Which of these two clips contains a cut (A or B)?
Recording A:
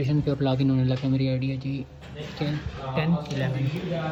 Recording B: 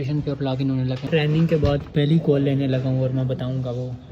B